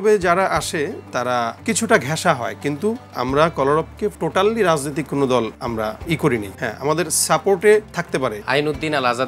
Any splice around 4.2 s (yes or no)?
yes